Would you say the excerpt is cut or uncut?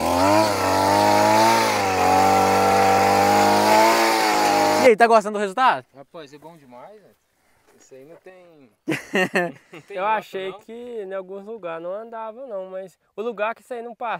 cut